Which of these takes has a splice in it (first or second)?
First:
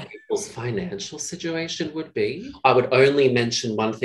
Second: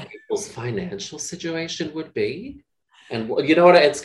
first